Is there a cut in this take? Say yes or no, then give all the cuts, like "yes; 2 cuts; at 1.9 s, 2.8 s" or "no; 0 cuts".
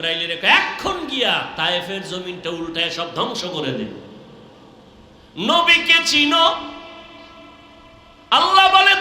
no; 0 cuts